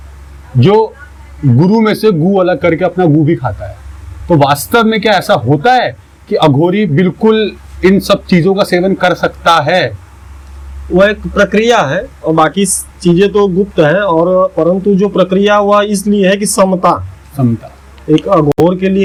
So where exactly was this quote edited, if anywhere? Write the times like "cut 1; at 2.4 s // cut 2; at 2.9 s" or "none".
none

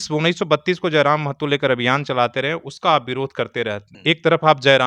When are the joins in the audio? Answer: cut 1; at 3.9 s

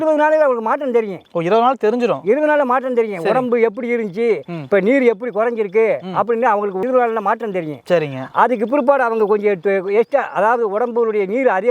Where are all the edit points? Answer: none

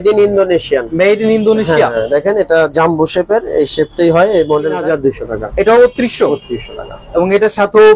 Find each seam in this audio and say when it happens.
cut 1; at 4.8 s

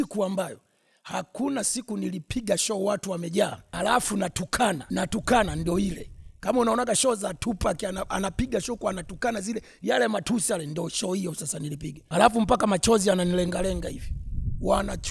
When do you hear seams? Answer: cut 1; at 3.6 s // cut 2; at 4.8 s // cut 3; at 11.9 s

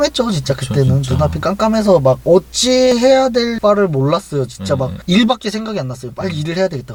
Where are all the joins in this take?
none

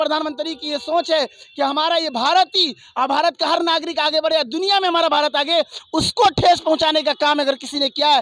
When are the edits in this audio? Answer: none

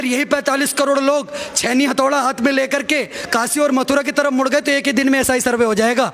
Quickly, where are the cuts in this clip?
none

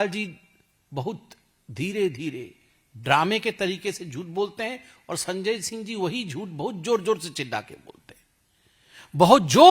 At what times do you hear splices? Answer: none

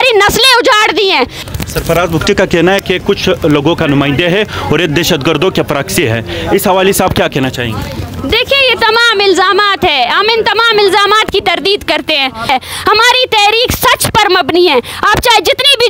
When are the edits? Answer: cut 1; at 1.4 s // cut 2; at 12.5 s

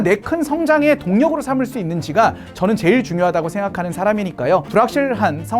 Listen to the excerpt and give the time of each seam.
cut 1; at 4.7 s

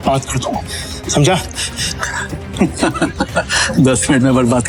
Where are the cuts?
none

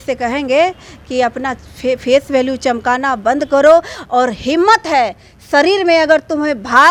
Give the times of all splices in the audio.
none

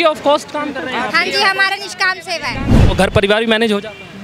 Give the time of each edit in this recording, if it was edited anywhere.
cut 1; at 2.8 s

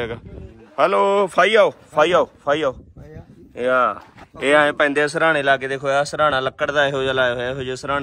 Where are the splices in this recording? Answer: none

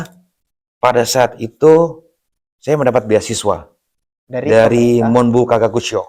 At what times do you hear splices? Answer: none

